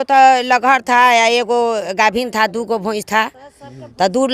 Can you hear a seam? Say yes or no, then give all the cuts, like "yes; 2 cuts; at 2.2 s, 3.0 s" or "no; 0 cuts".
no; 0 cuts